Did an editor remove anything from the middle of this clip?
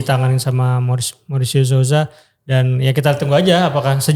no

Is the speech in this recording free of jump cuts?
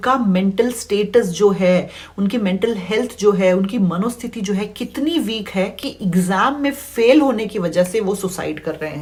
yes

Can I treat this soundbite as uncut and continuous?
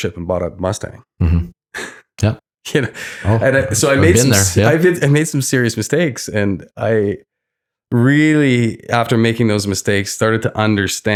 yes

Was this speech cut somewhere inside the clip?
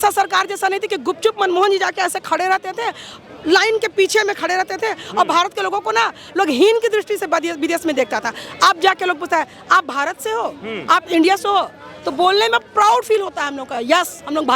no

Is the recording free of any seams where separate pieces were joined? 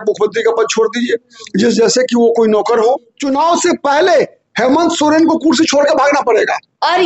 no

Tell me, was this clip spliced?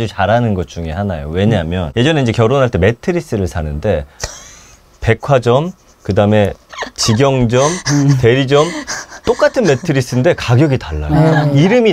yes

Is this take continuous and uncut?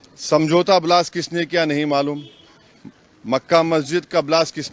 yes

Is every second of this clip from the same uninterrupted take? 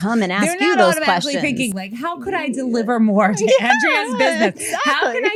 yes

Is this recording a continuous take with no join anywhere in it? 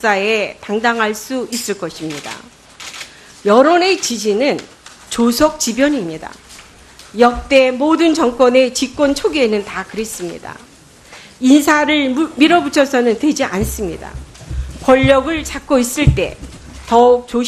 no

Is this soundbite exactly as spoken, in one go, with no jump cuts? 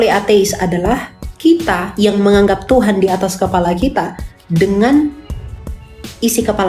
yes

